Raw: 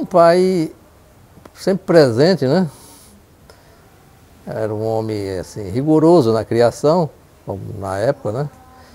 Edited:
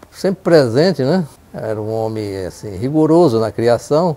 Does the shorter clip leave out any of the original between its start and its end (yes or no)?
yes